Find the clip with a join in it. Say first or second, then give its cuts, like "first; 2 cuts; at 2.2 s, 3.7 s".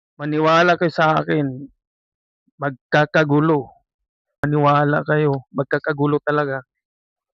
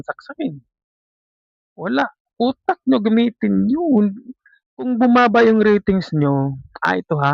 first; 1 cut; at 4.4 s